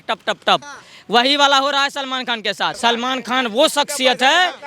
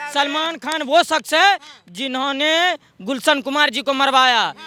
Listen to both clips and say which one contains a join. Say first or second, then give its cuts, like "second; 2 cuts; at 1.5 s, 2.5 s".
first; 1 cut; at 2.8 s